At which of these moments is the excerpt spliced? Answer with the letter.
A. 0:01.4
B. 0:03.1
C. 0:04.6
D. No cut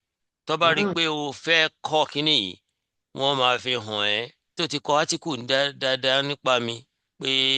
C